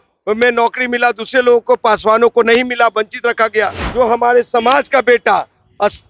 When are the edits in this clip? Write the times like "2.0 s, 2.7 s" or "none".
3.8 s